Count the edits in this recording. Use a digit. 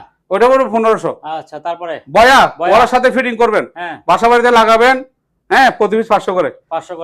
0